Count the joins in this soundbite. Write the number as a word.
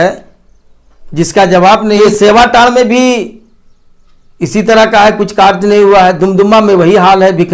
one